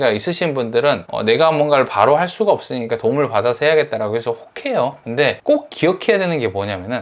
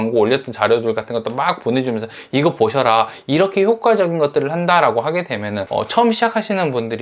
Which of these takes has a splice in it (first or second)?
first